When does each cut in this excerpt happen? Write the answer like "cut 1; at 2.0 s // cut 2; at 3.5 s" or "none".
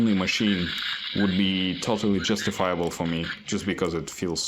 none

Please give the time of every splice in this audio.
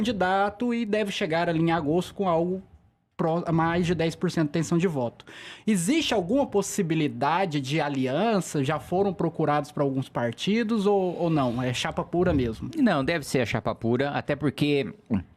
none

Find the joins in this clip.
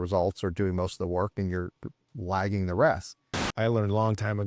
cut 1; at 3.5 s

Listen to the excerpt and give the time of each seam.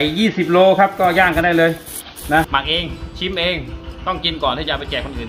cut 1; at 2.5 s

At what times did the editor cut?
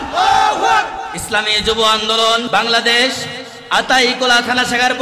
cut 1; at 1.0 s // cut 2; at 2.5 s

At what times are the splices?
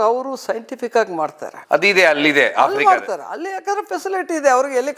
none

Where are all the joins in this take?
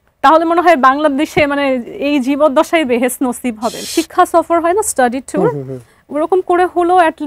cut 1; at 3.9 s

